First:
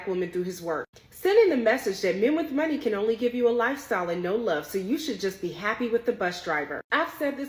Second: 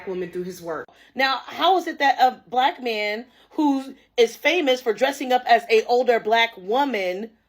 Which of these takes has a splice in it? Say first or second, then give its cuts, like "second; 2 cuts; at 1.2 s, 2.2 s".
second; 1 cut; at 1.0 s